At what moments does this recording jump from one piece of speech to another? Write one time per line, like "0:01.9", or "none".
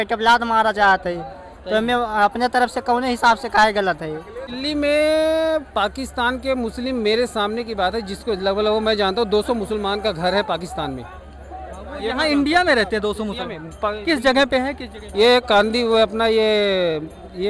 0:04.5